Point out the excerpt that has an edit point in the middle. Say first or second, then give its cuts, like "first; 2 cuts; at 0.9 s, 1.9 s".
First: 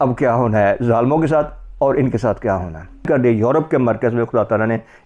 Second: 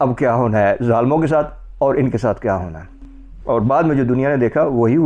first; 1 cut; at 3.0 s